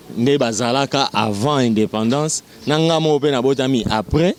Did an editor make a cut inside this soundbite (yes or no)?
no